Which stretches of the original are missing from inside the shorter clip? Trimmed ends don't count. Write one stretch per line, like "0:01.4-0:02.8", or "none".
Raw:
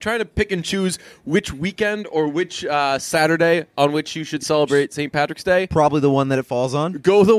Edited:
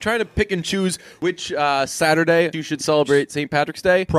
0:01.2-0:02.3
0:03.7-0:04.2

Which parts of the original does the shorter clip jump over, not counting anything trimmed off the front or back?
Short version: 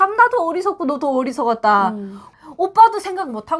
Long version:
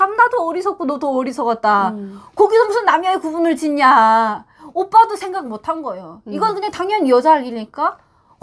0:02.2-0:04.4

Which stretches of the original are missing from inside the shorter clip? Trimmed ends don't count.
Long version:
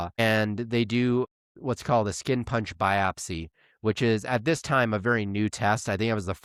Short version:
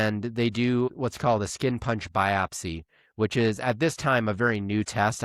0:01.3-0:01.6

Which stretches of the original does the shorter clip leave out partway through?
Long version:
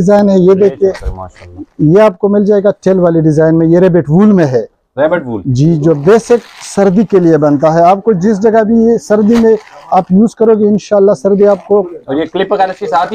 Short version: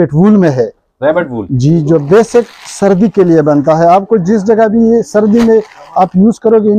none

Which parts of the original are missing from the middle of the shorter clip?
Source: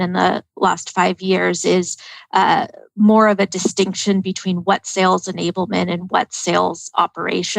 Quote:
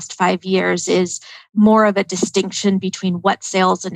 0:02.1-0:02.8

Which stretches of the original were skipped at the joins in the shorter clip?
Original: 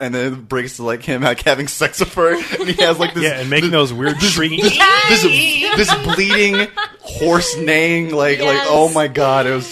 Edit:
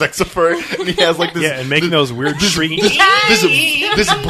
none

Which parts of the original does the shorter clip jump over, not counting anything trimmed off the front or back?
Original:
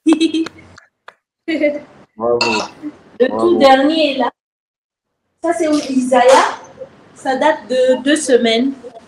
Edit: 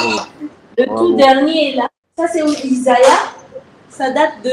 0:04.4-0:05.3

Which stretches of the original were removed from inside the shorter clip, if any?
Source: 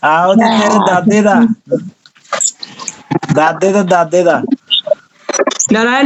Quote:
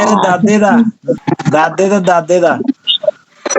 0:01.8-0:03.0

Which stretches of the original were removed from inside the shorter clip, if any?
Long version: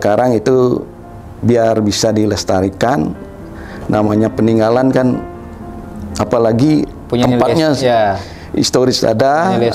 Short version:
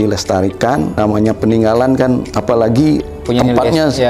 0:03.1-0:03.9
0:05.3-0:06.2

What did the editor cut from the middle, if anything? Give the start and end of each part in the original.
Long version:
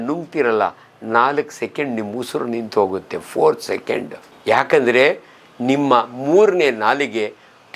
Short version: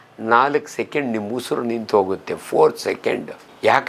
none

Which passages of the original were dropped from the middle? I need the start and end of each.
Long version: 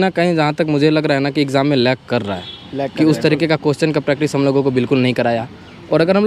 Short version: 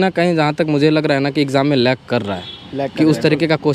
none

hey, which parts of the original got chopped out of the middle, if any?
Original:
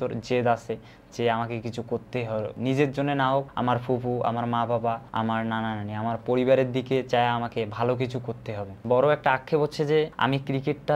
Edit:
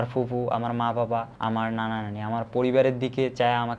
none

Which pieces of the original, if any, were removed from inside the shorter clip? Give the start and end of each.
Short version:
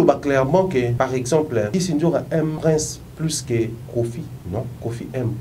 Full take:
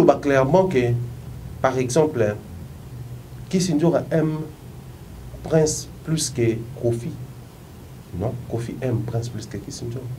0:00.9-0:01.6
0:02.3-0:03.5
0:04.4-0:05.5
0:07.2-0:08.0

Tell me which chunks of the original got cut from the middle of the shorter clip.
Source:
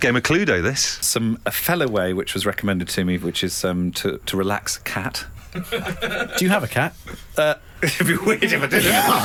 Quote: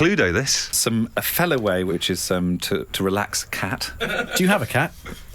0:02.2-0:03.3
0:05.3-0:06.0

